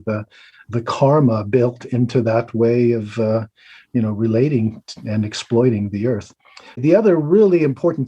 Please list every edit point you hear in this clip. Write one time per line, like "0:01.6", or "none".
0:06.8